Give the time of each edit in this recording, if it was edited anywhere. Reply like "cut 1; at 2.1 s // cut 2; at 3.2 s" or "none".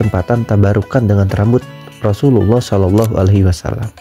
none